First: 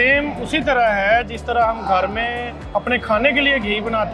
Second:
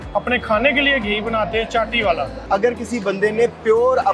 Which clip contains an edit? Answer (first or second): second